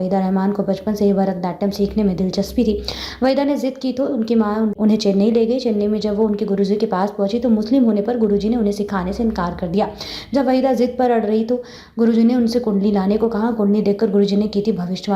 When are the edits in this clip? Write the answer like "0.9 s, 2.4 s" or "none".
4.7 s